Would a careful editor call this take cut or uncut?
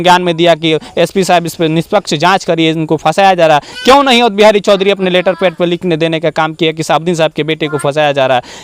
uncut